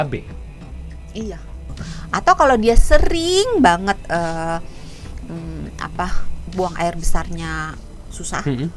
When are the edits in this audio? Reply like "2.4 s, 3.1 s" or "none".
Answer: 1.8 s